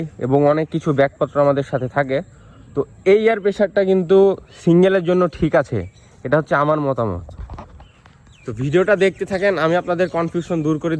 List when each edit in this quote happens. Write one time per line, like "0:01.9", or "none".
none